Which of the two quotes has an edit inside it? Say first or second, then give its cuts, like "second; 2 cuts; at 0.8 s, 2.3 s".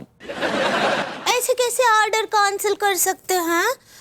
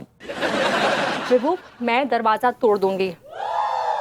first; 1 cut; at 1.1 s